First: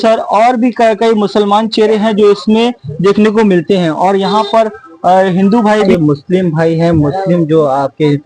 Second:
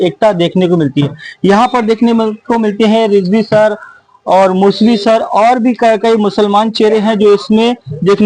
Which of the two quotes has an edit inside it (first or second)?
first